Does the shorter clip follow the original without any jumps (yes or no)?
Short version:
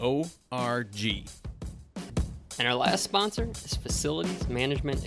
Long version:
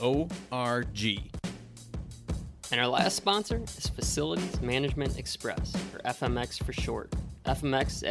no